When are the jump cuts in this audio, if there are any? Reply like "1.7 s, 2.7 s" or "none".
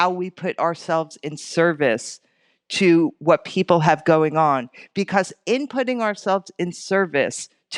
none